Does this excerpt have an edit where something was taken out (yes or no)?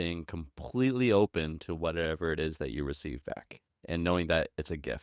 yes